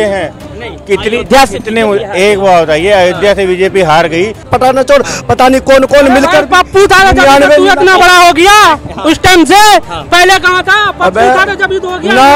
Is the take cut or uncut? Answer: cut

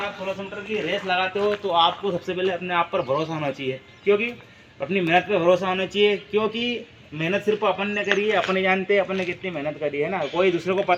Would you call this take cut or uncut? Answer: uncut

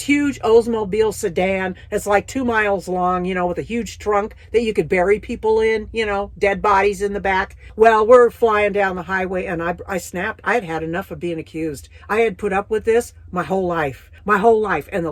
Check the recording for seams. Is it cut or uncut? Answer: uncut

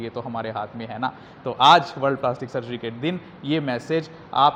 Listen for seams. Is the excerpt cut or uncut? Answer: uncut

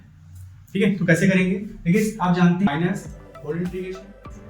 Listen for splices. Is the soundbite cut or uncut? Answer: cut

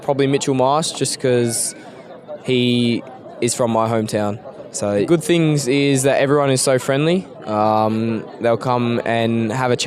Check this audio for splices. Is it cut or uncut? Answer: cut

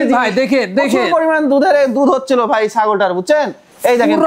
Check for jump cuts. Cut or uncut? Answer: uncut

